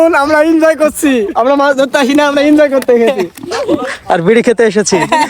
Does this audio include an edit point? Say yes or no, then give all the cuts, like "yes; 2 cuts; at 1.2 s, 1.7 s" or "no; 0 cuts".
no; 0 cuts